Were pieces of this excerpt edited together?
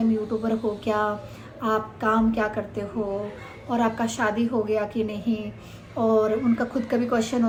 no; 0 cuts

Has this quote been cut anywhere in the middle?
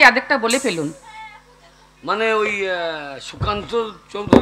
no; 0 cuts

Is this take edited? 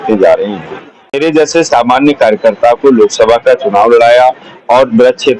yes; 1 cut; at 1.2 s

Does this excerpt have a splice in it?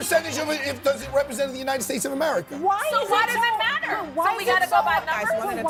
no; 0 cuts

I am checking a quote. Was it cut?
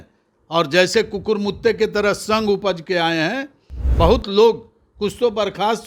no; 0 cuts

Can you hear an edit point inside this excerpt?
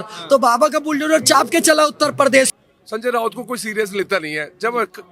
yes; 1 cut; at 2.5 s

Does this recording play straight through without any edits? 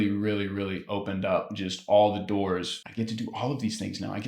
no; 1 cut; at 2.8 s

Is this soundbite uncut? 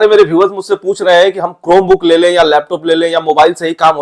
yes; 0 cuts

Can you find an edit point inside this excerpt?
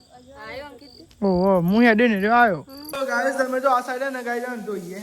yes; 1 cut; at 2.9 s

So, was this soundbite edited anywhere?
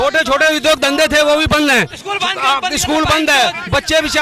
no; 0 cuts

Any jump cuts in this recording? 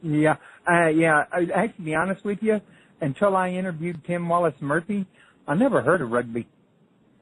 no; 0 cuts

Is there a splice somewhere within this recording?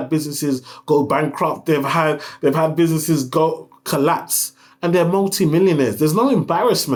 no; 0 cuts

